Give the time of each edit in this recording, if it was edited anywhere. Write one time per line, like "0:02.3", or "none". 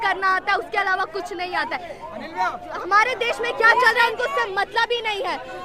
none